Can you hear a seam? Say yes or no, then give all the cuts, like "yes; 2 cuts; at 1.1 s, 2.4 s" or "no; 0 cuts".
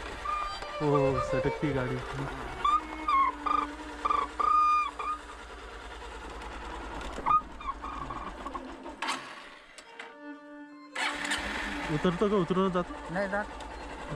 no; 0 cuts